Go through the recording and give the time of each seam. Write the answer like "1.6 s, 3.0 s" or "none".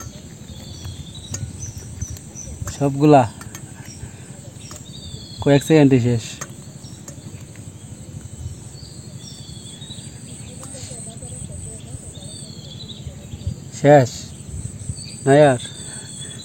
none